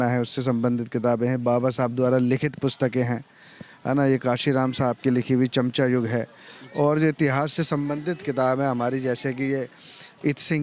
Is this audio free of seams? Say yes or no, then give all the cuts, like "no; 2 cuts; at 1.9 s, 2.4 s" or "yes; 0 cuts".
yes; 0 cuts